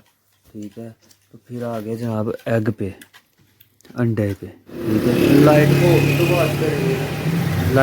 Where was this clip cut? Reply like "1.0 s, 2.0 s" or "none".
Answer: 5.1 s